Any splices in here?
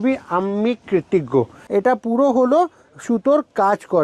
yes; 1 cut; at 1.6 s

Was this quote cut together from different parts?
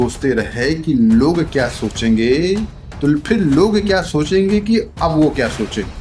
no; 0 cuts

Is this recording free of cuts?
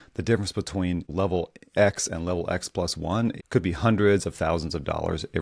no; 2 cuts; at 1.1 s, 3.4 s

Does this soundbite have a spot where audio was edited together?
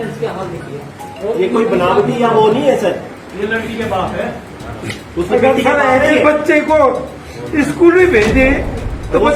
no; 0 cuts

